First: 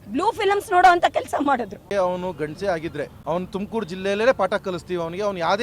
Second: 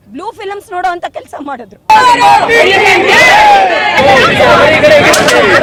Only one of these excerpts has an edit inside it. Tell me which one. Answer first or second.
first